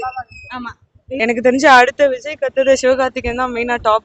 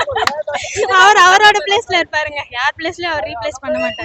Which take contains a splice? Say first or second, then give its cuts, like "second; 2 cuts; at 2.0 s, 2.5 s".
first; 1 cut; at 1.2 s